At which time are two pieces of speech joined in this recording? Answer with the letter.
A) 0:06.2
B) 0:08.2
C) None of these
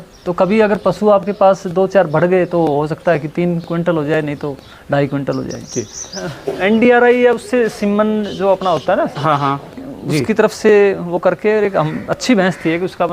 A